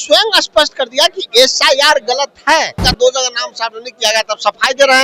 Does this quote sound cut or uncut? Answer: cut